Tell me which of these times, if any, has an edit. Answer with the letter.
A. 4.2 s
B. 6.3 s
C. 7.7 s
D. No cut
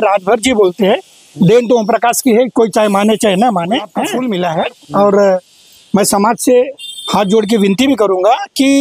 A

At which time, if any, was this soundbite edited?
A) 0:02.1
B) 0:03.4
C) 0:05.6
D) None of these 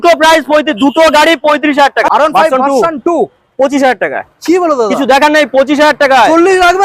A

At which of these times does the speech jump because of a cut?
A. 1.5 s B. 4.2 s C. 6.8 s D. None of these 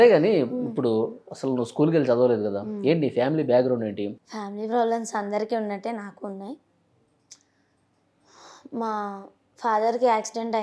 B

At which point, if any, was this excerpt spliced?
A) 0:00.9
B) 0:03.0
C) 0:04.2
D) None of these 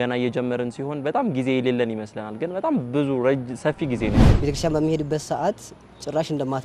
C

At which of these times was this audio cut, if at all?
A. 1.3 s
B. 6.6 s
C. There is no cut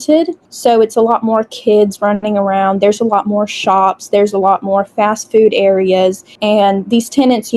B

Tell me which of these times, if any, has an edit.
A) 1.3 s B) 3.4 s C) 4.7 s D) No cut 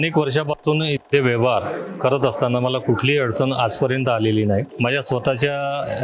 C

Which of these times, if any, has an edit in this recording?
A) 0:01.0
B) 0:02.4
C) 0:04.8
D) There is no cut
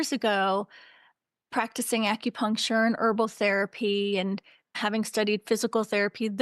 C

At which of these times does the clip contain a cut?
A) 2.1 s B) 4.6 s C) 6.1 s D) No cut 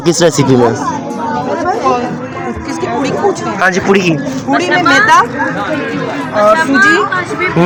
D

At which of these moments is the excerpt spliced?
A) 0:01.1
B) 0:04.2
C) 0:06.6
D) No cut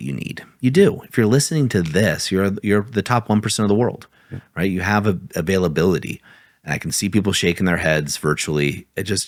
D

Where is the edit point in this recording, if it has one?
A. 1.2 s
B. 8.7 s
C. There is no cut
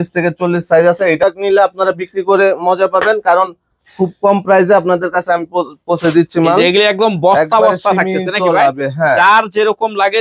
A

